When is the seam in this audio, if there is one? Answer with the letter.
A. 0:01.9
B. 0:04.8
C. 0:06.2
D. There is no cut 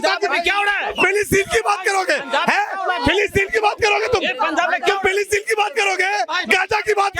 D